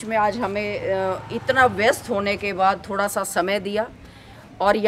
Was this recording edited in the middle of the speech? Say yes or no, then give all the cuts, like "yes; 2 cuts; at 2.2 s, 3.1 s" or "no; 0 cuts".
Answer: no; 0 cuts